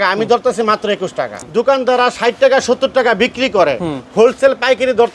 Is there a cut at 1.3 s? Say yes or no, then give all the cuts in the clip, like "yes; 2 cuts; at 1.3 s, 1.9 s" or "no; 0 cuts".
yes; 1 cut; at 1.3 s